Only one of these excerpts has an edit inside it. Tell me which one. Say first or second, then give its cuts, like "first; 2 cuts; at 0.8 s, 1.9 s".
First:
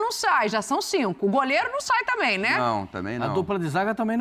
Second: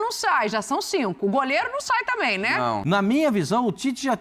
second; 1 cut; at 2.8 s